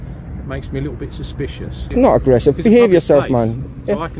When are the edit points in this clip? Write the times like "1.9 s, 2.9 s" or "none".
1.7 s